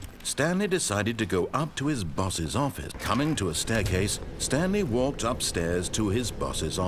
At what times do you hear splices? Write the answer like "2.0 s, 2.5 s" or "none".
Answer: 3.0 s